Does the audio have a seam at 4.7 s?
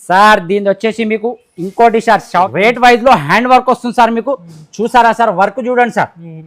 no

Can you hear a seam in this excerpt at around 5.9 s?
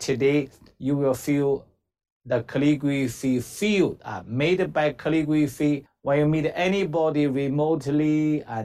yes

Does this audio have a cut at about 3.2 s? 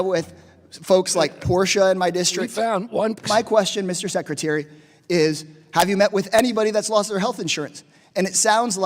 yes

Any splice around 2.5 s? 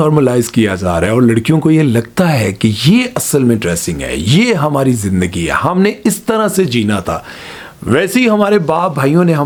no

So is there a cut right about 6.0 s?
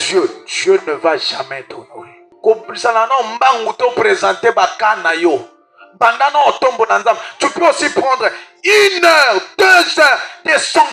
no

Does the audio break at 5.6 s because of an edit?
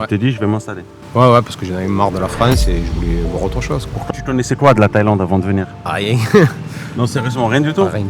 no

